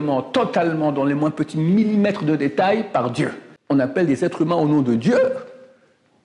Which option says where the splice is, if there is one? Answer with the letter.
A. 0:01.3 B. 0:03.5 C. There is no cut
B